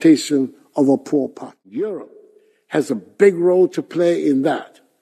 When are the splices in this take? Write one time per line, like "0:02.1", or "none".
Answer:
0:01.3